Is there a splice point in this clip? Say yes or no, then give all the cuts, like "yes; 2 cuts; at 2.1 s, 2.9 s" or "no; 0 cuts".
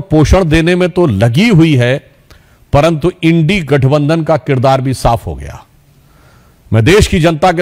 no; 0 cuts